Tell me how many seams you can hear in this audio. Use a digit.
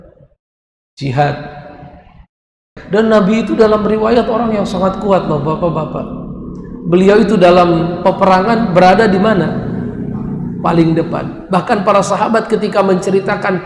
1